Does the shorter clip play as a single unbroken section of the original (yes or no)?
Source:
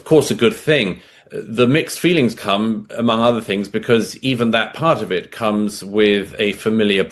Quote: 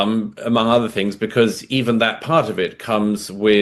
yes